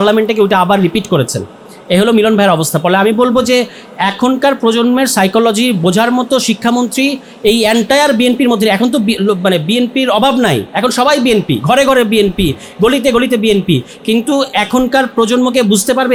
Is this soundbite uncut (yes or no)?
yes